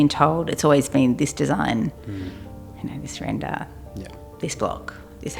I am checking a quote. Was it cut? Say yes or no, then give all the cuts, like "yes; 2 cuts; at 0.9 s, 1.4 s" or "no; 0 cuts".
no; 0 cuts